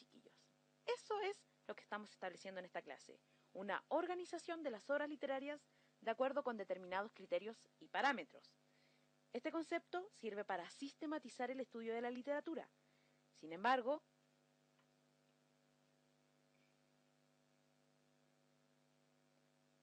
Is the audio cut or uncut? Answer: uncut